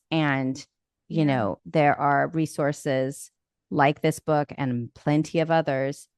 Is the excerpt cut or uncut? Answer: uncut